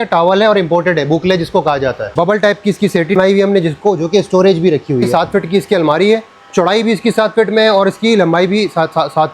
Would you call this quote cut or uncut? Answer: cut